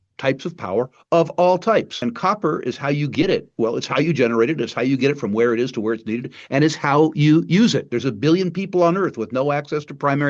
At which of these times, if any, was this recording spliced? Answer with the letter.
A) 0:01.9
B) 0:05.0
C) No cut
A